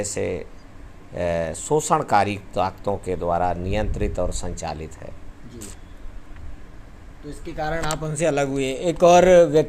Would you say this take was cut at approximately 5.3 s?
no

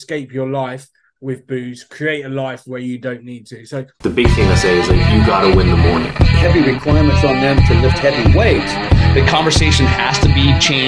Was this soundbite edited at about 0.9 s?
no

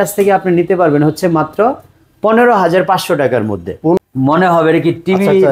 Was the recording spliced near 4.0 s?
yes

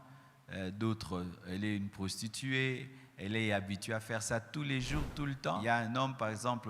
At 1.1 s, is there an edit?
no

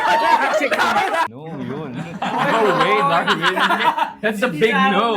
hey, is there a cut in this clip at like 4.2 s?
no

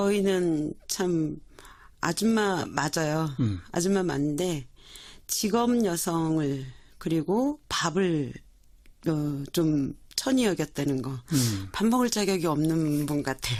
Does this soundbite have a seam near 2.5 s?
no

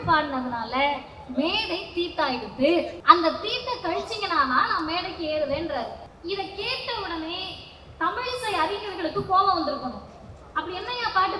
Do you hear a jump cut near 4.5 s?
no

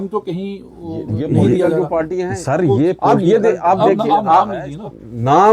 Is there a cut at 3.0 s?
yes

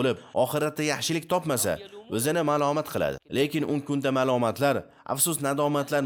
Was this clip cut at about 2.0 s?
no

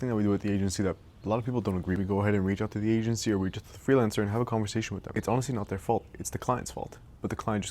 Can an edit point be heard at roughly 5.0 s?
yes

